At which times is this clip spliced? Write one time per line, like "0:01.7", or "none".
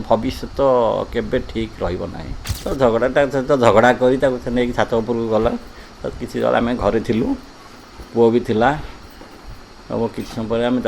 0:02.5

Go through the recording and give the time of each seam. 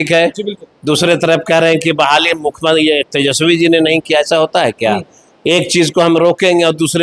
none

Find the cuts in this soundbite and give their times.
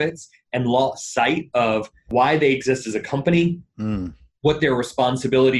0:02.1

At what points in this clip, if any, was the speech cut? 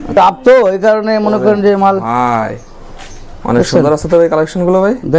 none

